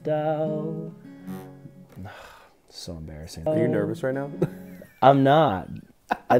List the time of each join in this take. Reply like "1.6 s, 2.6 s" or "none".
3.5 s